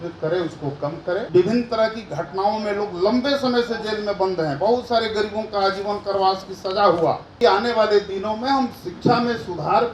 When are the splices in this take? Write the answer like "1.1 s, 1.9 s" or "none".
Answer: 1.3 s, 7.3 s